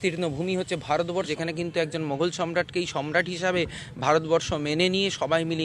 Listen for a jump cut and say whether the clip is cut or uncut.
cut